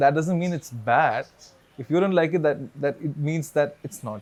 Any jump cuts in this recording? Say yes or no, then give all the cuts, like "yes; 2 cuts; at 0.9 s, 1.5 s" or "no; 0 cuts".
no; 0 cuts